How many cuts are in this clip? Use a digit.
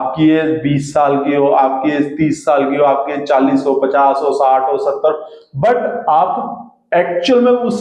0